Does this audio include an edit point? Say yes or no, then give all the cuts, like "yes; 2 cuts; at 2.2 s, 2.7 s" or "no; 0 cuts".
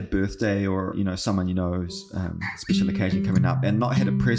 yes; 1 cut; at 0.9 s